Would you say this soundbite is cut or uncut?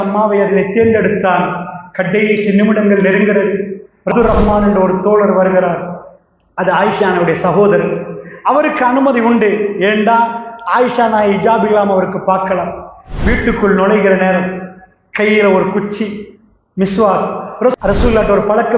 cut